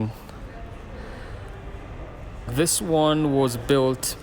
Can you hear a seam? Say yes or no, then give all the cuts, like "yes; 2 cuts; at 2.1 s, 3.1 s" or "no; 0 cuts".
yes; 1 cut; at 2.5 s